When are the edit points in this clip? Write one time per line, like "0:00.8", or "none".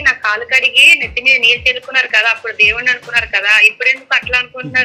none